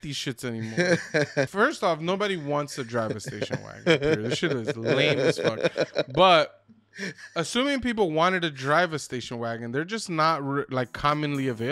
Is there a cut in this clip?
yes; 1 cut; at 1.5 s

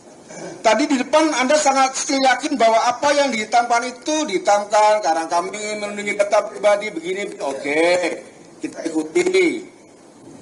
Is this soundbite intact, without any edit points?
yes; 0 cuts

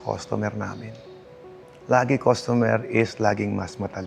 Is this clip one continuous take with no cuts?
yes; 0 cuts

